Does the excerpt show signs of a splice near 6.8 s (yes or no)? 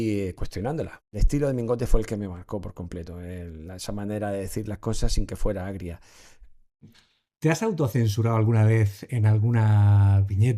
yes